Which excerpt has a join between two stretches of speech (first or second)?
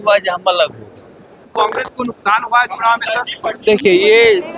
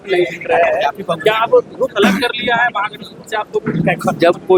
first